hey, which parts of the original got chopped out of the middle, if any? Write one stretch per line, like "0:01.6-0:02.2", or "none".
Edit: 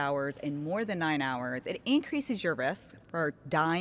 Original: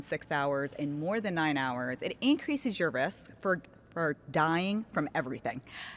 0:03.3-0:03.7